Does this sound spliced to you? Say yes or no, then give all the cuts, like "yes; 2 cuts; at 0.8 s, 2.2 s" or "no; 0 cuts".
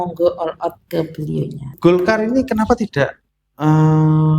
yes; 1 cut; at 1.7 s